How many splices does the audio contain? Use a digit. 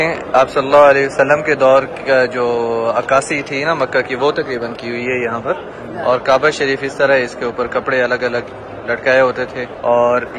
0